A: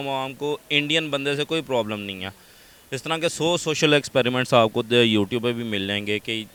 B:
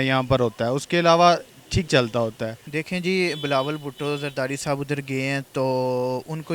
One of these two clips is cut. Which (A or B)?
B